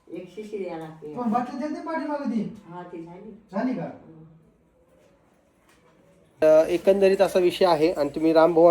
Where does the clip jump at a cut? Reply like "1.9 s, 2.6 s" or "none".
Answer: 6.4 s